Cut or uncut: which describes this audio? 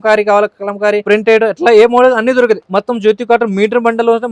cut